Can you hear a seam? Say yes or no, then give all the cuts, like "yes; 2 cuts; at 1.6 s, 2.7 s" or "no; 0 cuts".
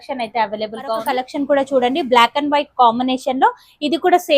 yes; 1 cut; at 1.0 s